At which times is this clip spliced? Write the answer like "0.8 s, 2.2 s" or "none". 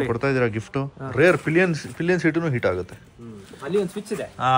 1.0 s